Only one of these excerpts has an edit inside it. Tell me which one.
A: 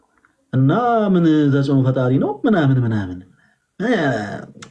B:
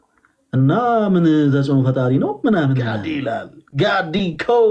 B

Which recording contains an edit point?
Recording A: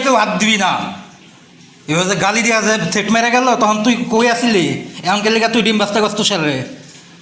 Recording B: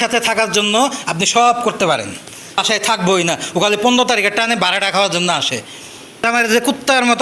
B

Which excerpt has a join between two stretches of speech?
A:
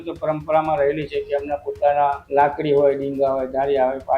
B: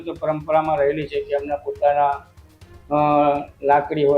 A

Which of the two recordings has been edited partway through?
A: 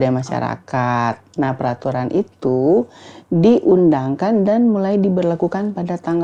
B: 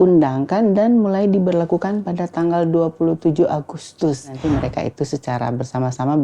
B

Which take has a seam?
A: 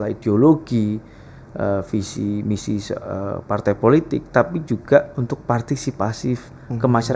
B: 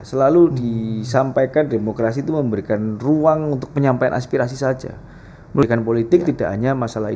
B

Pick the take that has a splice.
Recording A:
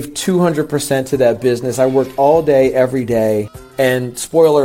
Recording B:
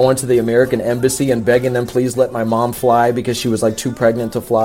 A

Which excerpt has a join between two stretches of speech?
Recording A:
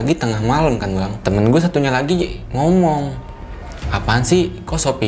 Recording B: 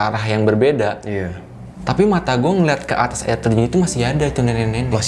A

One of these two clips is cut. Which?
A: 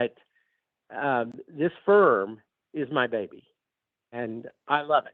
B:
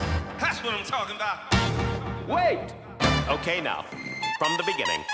A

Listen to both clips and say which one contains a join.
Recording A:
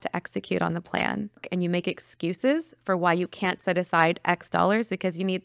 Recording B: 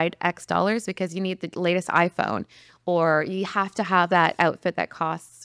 A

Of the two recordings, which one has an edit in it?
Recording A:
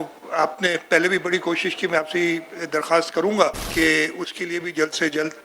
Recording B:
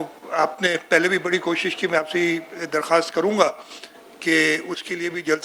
A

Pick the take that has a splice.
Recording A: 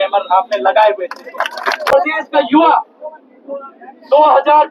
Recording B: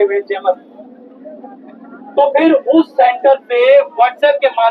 A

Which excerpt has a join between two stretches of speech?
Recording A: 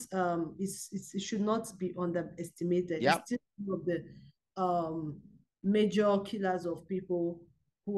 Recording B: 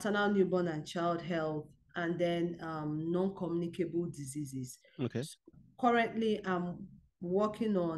B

